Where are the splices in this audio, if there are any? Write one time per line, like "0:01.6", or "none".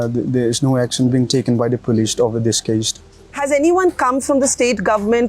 0:03.4